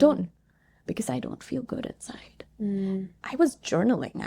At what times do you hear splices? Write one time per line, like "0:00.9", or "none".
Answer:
0:03.1